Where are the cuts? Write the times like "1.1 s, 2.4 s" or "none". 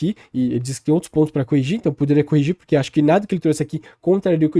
none